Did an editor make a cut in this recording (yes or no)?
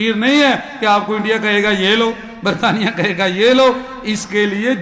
no